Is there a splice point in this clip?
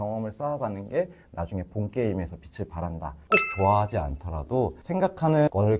yes; 2 cuts; at 3.1 s, 4.8 s

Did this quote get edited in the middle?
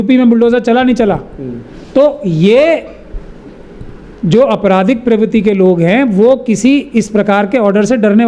no; 0 cuts

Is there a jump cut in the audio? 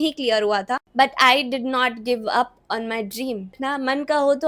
yes; 2 cuts; at 0.9 s, 3.6 s

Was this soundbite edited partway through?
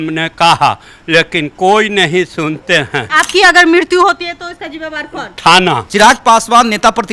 yes; 2 cuts; at 3.1 s, 5.8 s

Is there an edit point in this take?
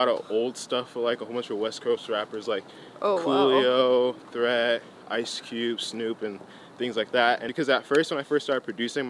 yes; 1 cut; at 7.5 s

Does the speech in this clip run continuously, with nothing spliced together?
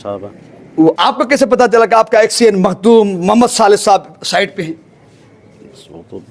no; 1 cut; at 0.9 s

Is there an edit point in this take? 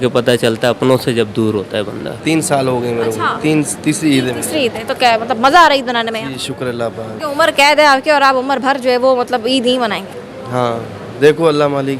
yes; 2 cuts; at 2.1 s, 7.1 s

